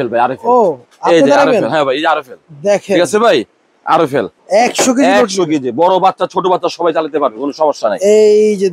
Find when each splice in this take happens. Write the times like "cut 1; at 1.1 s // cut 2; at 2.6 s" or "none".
cut 1; at 4.4 s